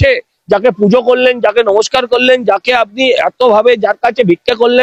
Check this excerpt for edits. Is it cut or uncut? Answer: uncut